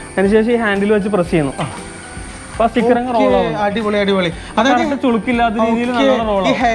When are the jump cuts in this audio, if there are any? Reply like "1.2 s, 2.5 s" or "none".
none